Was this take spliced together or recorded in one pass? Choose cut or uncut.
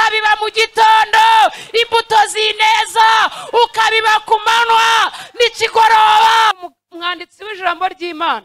cut